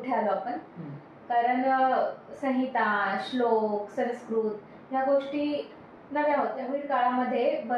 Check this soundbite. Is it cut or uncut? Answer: cut